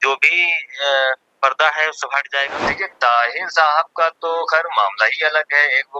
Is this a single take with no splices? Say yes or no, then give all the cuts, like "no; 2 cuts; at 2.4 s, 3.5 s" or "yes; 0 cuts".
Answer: no; 1 cut; at 2.6 s